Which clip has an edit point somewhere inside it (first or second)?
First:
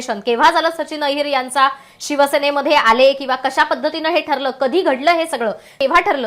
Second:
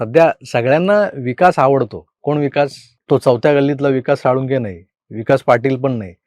second